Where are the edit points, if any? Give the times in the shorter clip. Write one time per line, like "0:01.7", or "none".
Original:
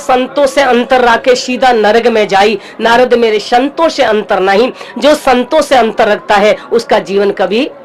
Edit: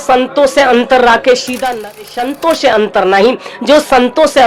0:01.9

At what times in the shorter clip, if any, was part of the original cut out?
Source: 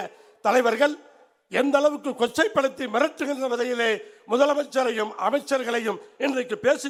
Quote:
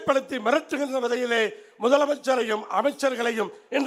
none

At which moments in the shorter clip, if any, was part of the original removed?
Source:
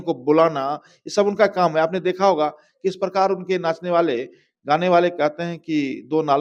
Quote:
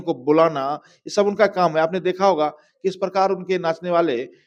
none

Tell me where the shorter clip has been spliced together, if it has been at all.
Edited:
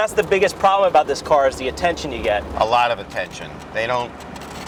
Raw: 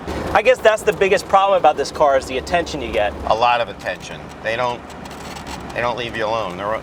none

